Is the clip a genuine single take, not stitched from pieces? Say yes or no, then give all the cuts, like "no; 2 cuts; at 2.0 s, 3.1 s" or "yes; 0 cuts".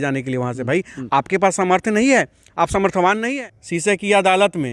no; 1 cut; at 3.2 s